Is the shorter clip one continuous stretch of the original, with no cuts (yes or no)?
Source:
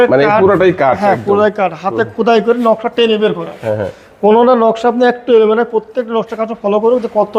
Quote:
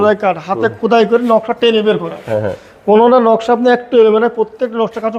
yes